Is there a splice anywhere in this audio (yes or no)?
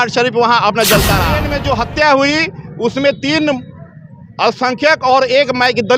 yes